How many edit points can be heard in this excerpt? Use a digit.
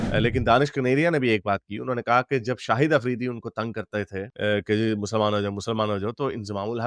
0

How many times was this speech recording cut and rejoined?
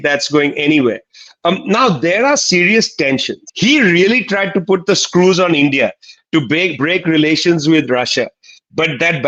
1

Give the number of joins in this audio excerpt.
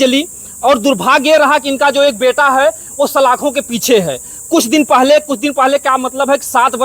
0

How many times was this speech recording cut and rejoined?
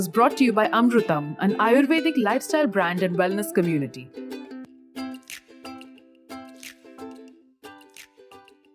1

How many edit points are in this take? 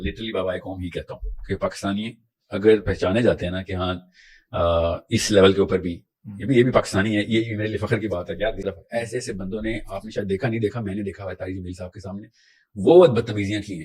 1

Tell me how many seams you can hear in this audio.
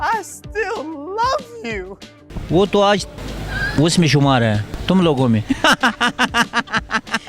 1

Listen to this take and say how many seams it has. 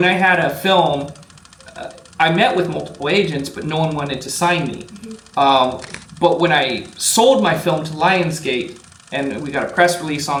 0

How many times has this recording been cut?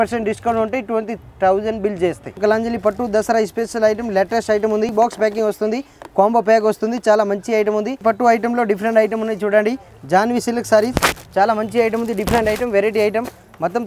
3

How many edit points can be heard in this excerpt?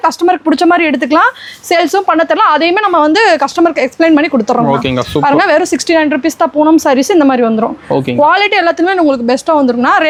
0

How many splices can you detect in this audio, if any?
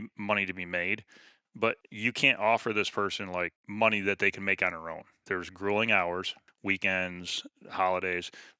4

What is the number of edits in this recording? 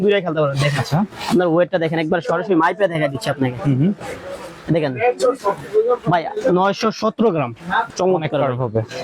1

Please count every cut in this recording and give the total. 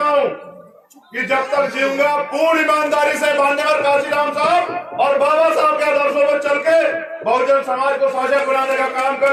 0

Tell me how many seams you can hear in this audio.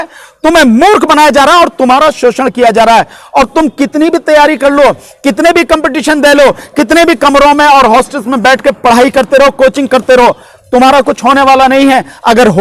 0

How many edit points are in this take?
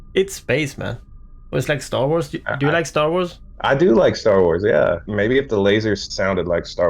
3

